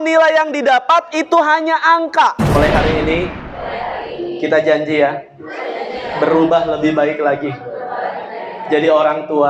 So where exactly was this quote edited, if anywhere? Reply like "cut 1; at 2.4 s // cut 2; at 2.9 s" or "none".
cut 1; at 2.6 s

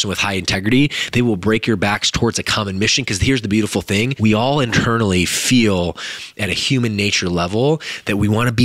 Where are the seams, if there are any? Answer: cut 1; at 4.1 s

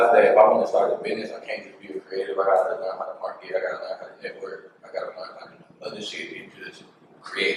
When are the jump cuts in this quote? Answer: none

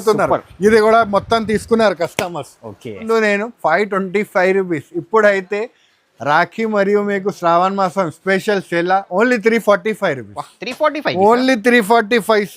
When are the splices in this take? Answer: cut 1; at 3.0 s

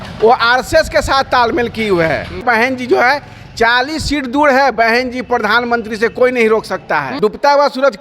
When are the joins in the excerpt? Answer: cut 1; at 2.4 s // cut 2; at 7.1 s

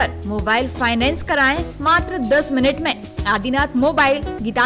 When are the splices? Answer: none

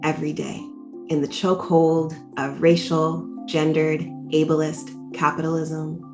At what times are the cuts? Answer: cut 1; at 1.1 s

